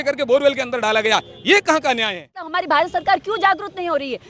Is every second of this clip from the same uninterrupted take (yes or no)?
no